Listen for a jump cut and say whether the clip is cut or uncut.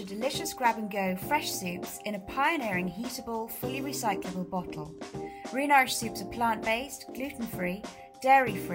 uncut